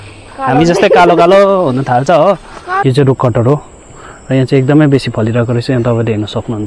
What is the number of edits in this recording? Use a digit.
1